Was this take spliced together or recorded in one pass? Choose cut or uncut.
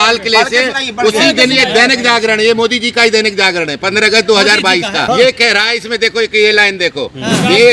cut